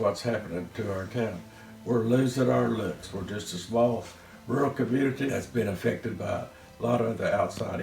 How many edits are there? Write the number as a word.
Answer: one